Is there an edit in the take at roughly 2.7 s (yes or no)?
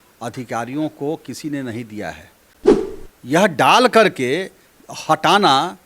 yes